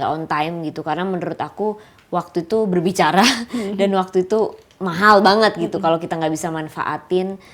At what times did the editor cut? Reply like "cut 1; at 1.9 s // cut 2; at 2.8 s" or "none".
none